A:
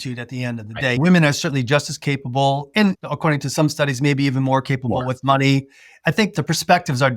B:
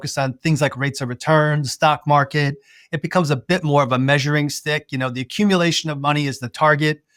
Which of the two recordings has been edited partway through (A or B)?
A